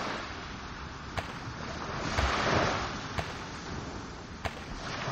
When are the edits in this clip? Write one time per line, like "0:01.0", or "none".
none